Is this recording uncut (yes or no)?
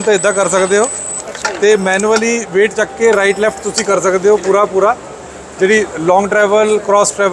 yes